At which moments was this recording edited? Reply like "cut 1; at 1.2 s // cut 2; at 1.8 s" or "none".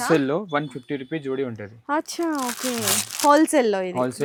none